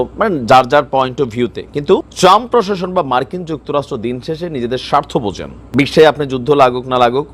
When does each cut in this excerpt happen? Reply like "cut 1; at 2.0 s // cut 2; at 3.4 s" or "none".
cut 1; at 2.1 s // cut 2; at 5.5 s